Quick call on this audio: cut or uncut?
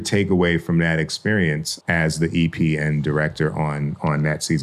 uncut